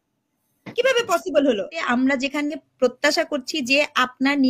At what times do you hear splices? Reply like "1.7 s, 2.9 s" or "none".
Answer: 1.8 s